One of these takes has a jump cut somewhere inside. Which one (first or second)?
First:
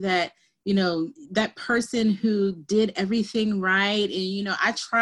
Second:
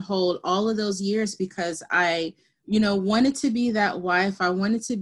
first